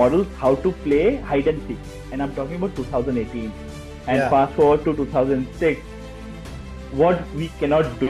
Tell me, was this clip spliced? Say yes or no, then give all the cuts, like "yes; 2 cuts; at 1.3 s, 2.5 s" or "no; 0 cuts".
no; 0 cuts